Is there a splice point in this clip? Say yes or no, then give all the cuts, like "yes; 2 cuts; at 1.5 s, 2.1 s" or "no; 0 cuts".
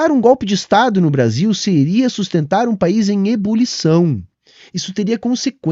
no; 0 cuts